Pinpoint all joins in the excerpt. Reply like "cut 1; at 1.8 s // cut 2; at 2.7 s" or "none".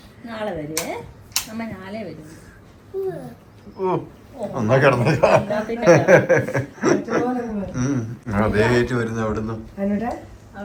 none